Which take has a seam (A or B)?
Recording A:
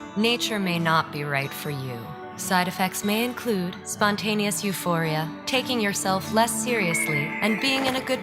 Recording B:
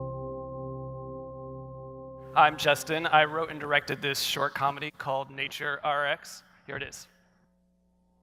A